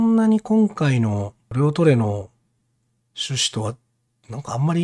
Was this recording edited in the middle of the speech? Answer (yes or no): yes